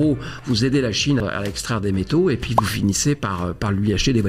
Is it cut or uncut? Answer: cut